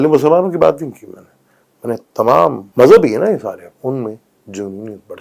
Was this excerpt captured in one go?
no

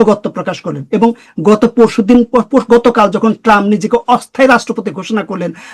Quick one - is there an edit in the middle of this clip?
no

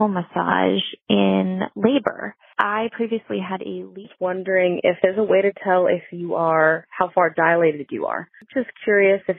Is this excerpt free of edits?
no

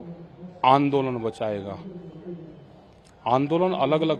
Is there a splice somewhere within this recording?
no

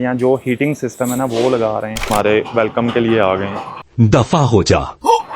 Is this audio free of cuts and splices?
no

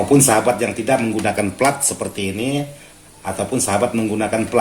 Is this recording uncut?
yes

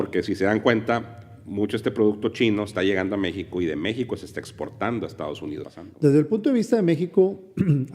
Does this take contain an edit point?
yes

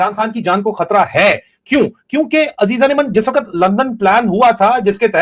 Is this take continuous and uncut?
yes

